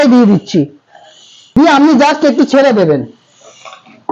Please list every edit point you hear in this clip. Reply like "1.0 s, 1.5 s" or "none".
1.6 s